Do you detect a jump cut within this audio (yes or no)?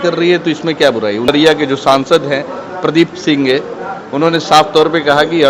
yes